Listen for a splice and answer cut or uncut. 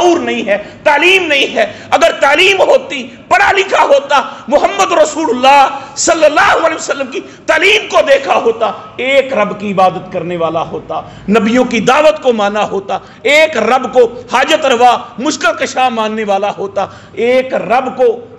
uncut